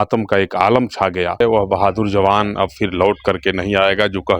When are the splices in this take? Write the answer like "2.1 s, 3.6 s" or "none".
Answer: 1.4 s